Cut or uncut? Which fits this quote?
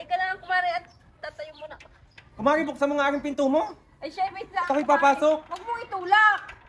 cut